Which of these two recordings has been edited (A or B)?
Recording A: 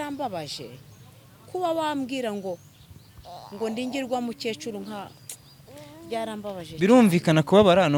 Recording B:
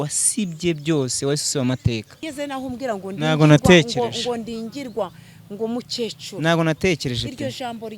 B